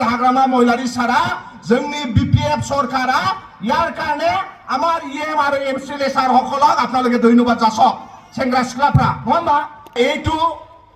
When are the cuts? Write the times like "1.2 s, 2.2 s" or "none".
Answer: 10.0 s